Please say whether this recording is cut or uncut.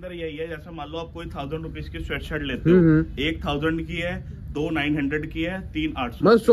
uncut